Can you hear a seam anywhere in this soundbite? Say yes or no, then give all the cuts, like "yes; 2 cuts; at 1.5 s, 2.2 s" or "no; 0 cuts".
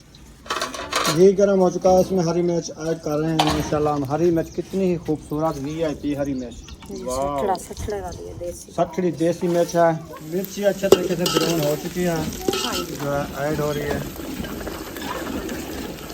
yes; 2 cuts; at 10.1 s, 13.0 s